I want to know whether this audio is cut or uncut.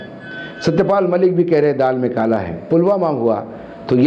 cut